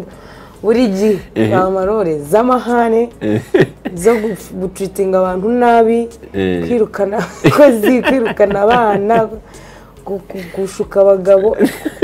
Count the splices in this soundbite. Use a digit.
0